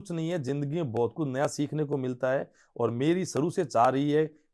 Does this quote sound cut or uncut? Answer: uncut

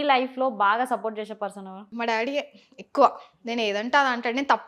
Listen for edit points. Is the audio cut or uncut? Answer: cut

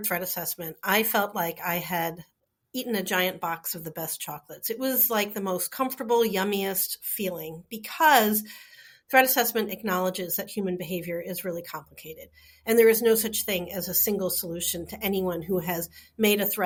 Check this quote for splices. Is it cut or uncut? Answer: uncut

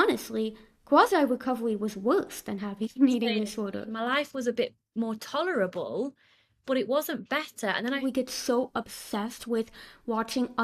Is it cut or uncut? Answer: cut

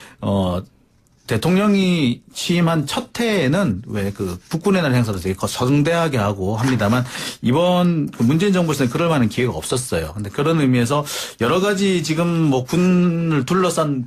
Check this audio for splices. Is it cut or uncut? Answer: uncut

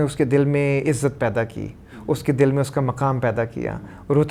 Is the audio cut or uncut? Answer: uncut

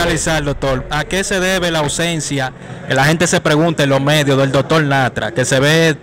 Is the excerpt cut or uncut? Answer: uncut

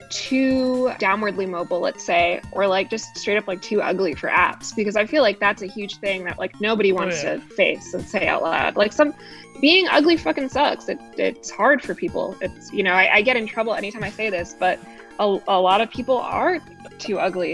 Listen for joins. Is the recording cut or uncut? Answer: cut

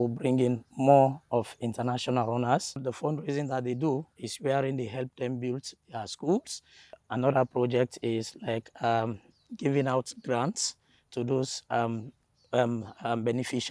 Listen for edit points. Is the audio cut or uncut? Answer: cut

